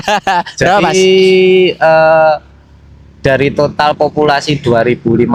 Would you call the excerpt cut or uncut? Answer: uncut